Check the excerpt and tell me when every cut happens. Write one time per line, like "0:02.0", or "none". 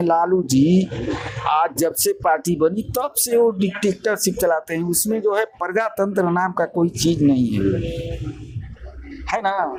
none